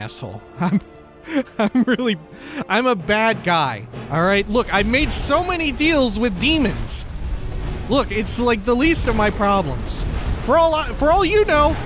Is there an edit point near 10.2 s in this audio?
no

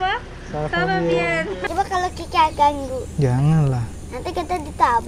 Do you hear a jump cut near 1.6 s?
yes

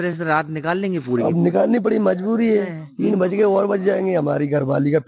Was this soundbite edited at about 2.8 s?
yes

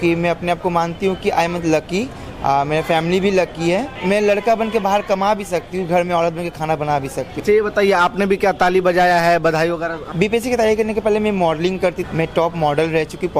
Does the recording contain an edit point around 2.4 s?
no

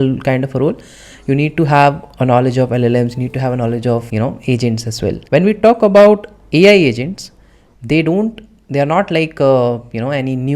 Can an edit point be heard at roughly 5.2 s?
yes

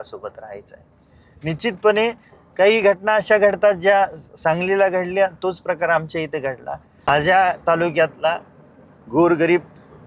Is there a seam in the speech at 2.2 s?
no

